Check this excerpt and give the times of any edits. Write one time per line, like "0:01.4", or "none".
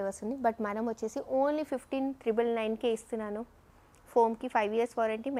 none